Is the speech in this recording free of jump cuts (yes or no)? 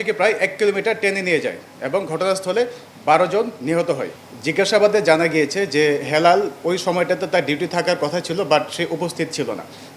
no